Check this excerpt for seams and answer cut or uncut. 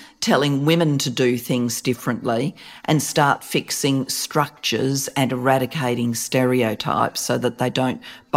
cut